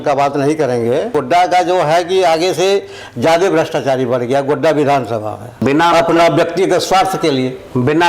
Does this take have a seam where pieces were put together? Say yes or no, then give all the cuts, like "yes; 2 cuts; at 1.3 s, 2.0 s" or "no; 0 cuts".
yes; 2 cuts; at 1.1 s, 5.5 s